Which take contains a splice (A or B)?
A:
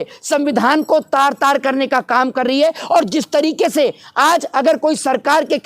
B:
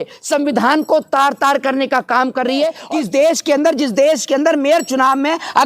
B